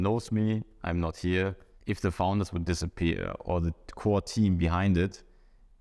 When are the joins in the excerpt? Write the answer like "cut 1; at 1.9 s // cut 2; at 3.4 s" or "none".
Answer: cut 1; at 1.7 s